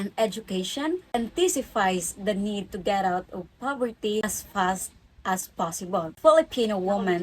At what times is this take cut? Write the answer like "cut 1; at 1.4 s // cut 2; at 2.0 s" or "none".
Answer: cut 1; at 1.0 s // cut 2; at 4.2 s // cut 3; at 6.1 s